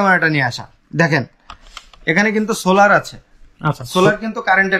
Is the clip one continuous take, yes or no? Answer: yes